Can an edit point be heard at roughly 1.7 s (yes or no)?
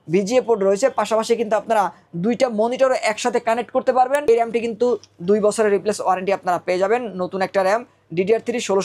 no